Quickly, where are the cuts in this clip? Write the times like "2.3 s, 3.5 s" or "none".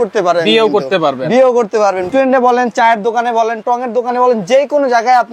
2.1 s